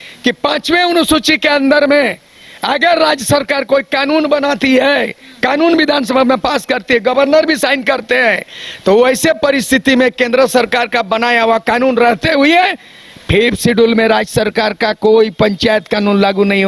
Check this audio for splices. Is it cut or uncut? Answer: uncut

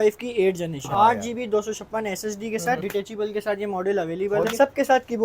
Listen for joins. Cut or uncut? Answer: cut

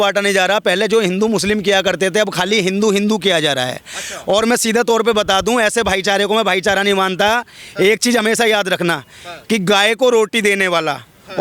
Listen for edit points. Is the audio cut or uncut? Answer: uncut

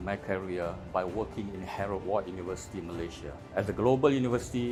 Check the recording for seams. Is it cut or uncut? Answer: uncut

